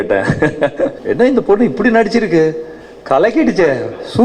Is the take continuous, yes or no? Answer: no